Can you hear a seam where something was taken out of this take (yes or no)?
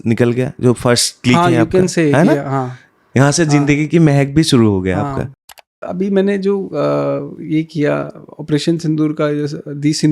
yes